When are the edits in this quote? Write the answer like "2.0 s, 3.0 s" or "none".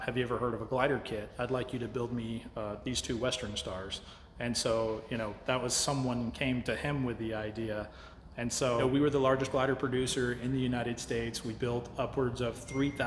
8.8 s

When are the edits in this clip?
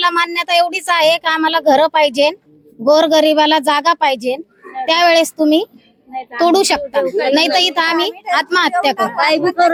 none

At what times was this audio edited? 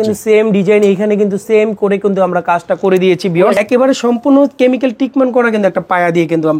3.6 s

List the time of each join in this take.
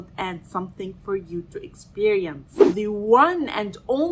2.7 s

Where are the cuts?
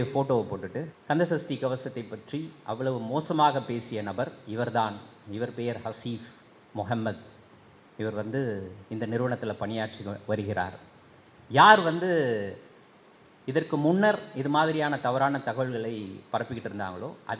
0.9 s

